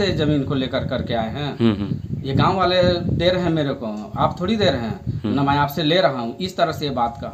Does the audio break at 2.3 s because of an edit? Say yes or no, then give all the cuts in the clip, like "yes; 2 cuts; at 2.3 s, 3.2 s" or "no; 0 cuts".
no; 0 cuts